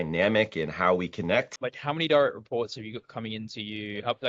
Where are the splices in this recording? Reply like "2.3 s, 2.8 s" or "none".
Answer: 1.5 s